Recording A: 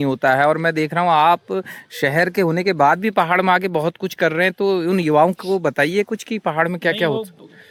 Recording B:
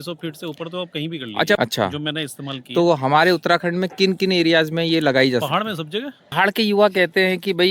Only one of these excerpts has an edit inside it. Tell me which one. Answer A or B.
B